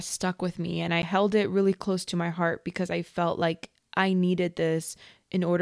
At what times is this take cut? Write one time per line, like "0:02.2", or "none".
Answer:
0:01.0

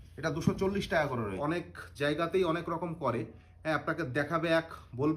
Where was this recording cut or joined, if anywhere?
0:01.4

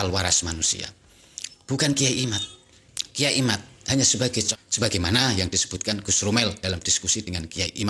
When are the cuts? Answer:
0:04.5

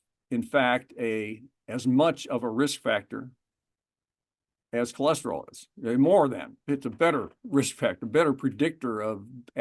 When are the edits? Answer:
0:06.5

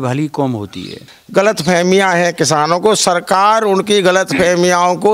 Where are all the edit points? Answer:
0:01.1

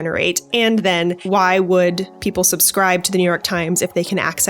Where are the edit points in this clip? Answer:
0:01.2
0:02.1

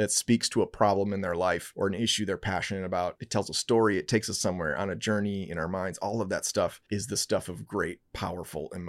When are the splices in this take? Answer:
0:01.7
0:03.2

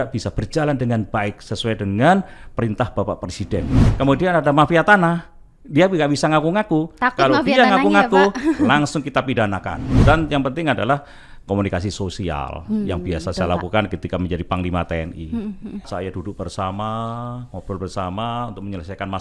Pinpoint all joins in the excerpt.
0:03.9
0:09.8
0:15.9

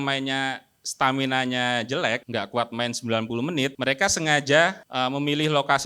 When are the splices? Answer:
0:02.2
0:03.8
0:04.8

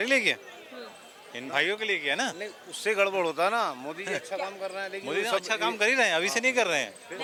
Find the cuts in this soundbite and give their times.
none

